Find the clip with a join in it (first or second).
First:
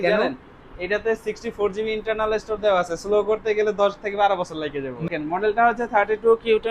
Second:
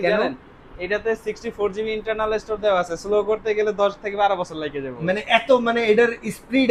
first